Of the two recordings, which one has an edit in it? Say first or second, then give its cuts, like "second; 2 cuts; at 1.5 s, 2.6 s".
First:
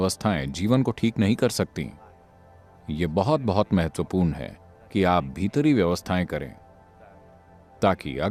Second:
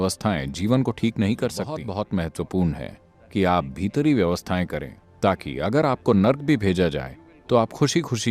second; 2 cuts; at 1.8 s, 5.0 s